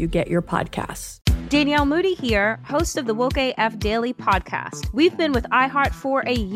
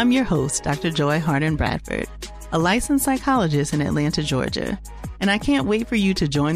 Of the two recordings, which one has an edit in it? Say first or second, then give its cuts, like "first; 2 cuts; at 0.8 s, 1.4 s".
first; 1 cut; at 1.0 s